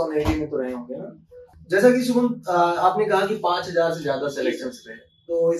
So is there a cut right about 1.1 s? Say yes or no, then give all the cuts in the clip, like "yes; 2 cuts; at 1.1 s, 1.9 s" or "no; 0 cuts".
no; 0 cuts